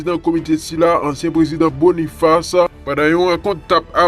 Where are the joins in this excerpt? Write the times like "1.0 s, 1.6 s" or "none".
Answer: 2.8 s